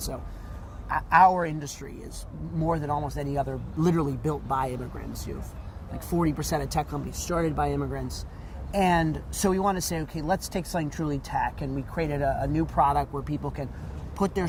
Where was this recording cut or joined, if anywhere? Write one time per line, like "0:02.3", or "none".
none

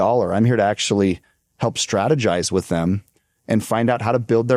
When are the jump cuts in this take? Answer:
none

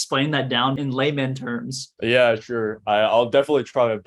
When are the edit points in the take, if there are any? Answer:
0:00.8
0:01.8

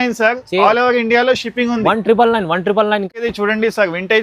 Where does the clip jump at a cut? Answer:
0:03.3

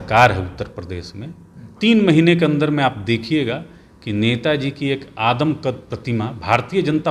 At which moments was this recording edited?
none

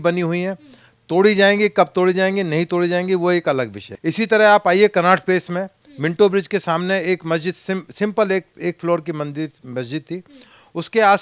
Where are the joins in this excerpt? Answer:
0:03.8

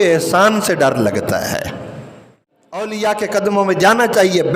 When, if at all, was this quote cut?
0:02.9

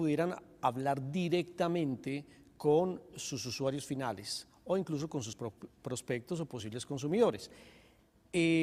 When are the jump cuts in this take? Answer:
none

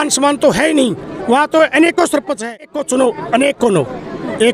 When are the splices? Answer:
0:02.7

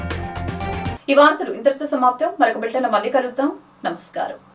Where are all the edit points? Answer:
none

